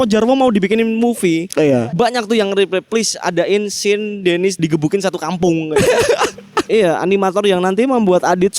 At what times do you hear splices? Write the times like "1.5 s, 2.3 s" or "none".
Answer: 4.6 s, 6.7 s